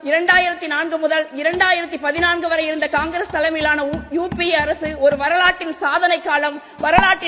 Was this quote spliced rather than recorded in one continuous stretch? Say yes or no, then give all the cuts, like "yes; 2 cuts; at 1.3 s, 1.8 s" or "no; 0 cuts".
no; 0 cuts